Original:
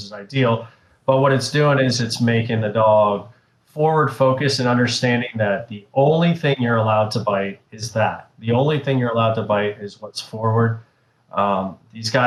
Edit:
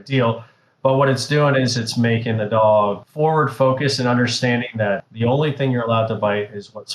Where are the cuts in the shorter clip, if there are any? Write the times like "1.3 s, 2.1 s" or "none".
3.0 s, 5.1 s

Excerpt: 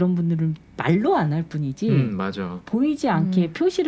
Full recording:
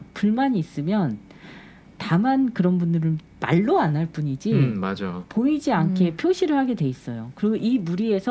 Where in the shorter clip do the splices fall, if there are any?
none

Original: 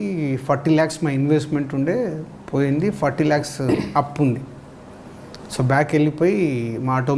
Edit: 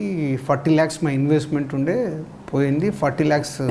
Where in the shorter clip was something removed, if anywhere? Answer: none

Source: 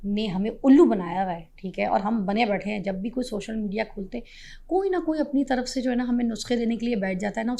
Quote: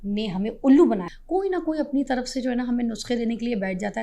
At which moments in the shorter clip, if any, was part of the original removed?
1.1 s

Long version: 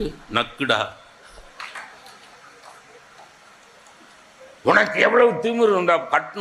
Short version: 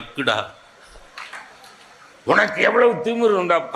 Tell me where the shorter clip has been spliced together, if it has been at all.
2.2 s

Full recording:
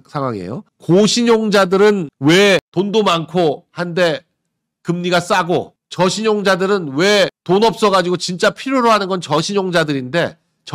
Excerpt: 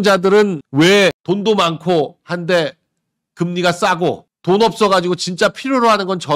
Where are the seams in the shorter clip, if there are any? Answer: 4.4 s

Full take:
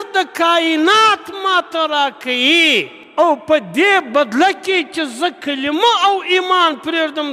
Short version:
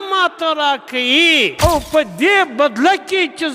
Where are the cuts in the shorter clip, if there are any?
1.5 s

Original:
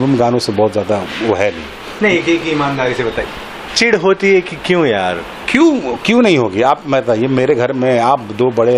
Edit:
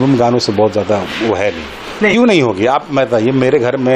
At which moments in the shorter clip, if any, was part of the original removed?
2.1 s

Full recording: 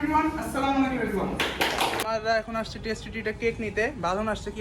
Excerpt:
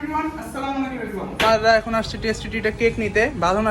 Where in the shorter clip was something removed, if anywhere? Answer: 1.4 s

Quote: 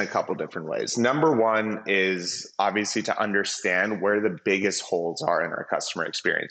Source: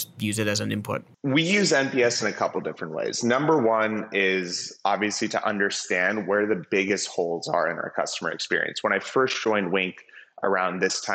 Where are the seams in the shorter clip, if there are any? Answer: none

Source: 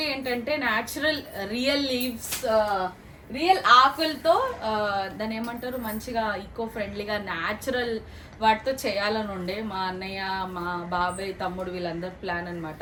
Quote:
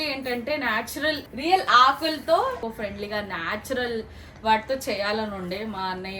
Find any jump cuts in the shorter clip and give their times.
1.3 s, 2.6 s

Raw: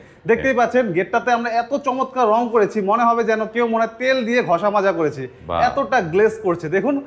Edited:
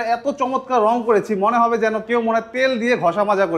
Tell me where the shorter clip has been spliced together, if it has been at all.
none

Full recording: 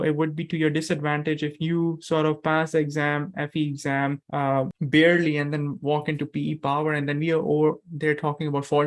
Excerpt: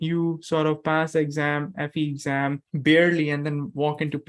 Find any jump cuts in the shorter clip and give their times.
2.7 s

